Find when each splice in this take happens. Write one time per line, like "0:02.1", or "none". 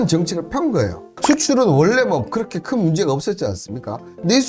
0:01.1